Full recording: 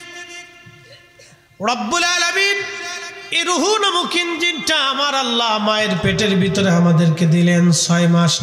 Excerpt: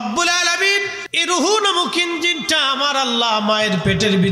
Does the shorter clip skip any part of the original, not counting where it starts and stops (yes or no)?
yes